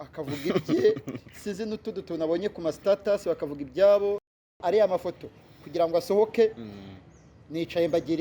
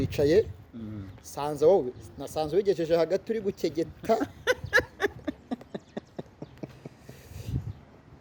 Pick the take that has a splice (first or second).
first